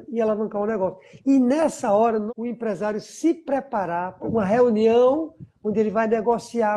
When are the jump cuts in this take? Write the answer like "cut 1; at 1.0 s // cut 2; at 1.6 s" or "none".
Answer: cut 1; at 2.3 s // cut 2; at 4.2 s